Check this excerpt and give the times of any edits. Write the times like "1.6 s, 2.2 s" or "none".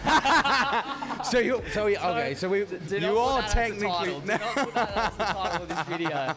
none